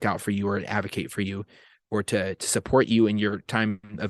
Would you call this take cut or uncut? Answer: uncut